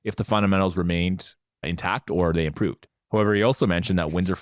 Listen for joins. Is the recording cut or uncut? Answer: cut